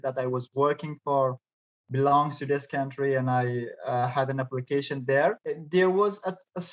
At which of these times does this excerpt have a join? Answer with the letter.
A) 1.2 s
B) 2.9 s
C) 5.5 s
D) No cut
C